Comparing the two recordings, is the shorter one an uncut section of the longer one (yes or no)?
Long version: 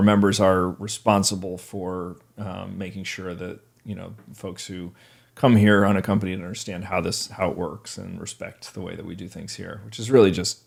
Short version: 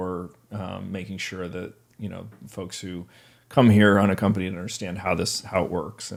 yes